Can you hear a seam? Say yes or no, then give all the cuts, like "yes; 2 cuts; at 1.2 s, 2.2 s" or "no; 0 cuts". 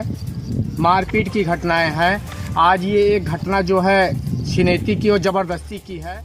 no; 0 cuts